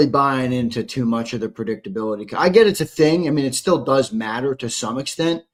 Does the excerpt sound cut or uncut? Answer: uncut